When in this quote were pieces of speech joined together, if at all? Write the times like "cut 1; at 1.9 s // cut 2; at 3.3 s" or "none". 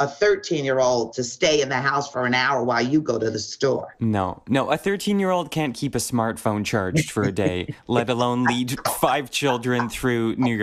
cut 1; at 3.9 s